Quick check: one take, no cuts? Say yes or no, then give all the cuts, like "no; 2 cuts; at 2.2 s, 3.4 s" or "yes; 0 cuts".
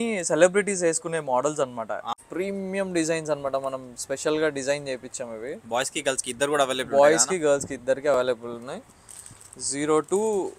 no; 1 cut; at 2.2 s